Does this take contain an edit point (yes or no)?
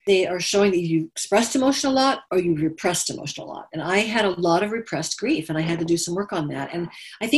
yes